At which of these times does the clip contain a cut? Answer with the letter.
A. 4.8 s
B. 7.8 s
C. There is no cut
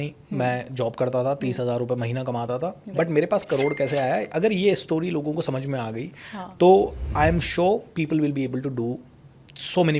C